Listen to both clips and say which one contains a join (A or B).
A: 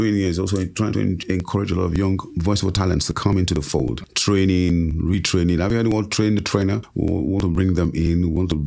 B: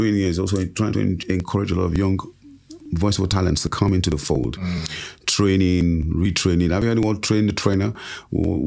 A